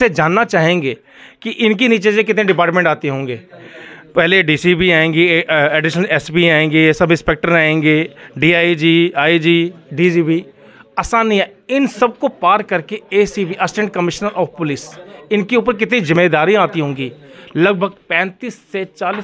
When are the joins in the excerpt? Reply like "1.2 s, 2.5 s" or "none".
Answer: none